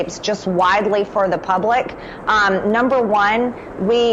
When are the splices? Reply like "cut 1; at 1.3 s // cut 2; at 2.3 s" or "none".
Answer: none